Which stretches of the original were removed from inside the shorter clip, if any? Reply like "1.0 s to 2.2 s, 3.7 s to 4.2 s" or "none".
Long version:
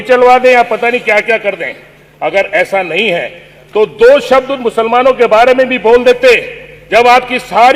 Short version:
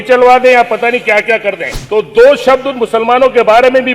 1.7 s to 3.6 s